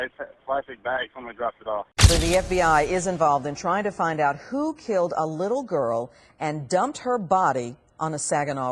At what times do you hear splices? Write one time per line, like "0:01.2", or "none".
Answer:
0:01.9